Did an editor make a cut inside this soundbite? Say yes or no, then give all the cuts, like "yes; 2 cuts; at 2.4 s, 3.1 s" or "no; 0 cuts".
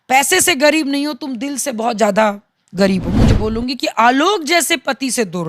yes; 1 cut; at 3.3 s